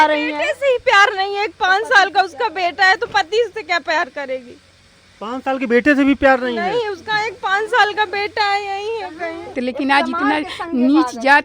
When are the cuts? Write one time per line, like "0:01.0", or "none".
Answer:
0:09.5